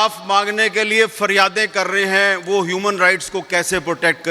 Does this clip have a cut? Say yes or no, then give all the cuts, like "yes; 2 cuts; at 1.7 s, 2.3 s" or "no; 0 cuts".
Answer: no; 0 cuts